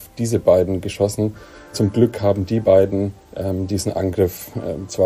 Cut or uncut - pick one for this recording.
cut